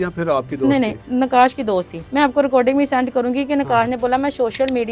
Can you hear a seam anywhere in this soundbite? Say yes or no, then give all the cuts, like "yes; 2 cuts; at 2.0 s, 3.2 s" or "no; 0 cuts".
yes; 1 cut; at 2.0 s